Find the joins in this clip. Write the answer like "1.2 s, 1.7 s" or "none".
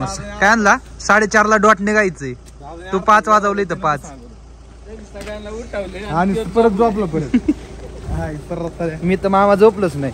none